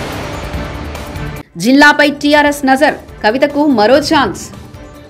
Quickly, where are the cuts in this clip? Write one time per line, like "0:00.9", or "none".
none